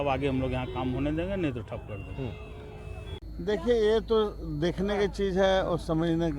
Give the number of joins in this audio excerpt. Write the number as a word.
one